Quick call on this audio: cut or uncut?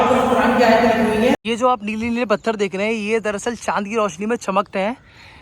cut